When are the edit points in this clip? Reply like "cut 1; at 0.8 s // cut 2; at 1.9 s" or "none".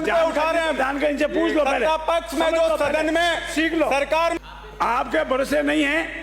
cut 1; at 4.4 s